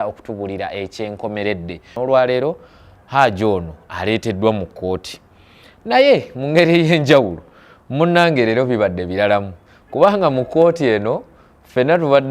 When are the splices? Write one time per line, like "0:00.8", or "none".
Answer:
0:01.9